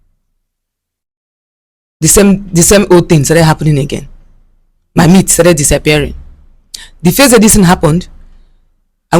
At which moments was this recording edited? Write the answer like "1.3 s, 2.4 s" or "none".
none